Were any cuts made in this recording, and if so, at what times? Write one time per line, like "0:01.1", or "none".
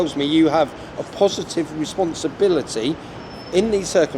none